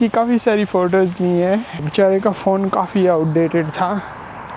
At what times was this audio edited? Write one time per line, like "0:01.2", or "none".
0:01.8